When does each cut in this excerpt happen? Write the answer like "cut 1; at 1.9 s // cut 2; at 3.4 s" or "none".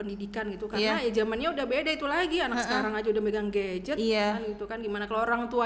none